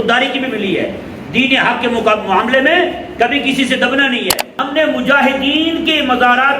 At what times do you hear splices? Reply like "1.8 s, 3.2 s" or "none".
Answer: 4.5 s